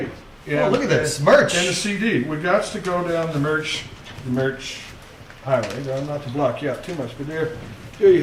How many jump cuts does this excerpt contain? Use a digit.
0